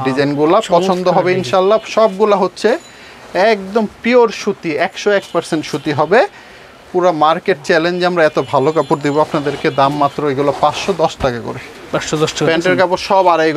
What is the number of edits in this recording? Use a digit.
0